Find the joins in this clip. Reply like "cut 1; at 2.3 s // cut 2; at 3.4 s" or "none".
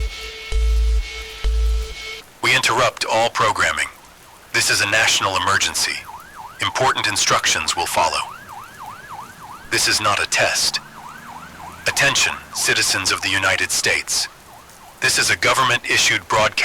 cut 1; at 2.3 s